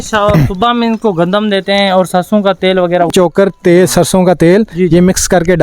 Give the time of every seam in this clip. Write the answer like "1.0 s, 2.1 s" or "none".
3.1 s